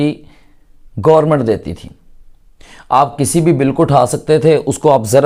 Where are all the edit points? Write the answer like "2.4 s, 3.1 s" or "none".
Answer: none